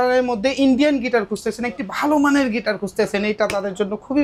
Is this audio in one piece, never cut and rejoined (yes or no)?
yes